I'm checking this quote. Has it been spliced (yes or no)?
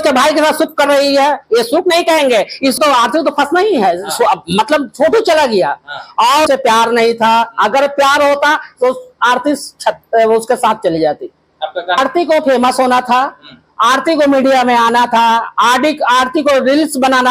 yes